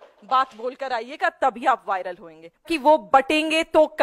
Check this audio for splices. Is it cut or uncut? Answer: cut